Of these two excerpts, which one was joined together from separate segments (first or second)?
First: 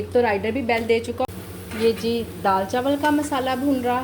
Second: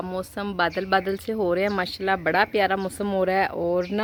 first